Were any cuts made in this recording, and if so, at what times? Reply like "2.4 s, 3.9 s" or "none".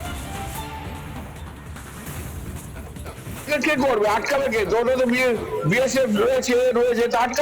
1.2 s, 2.4 s, 3.5 s